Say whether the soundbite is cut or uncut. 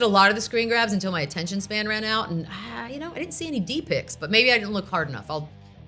uncut